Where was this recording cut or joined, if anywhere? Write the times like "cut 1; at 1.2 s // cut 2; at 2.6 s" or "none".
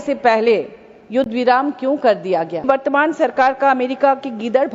cut 1; at 2.6 s